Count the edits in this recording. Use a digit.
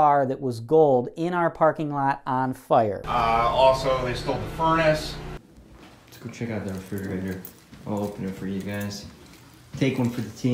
2